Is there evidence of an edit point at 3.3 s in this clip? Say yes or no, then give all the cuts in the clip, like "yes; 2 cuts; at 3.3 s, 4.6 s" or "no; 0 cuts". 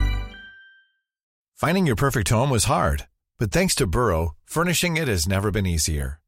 no; 1 cut; at 1.4 s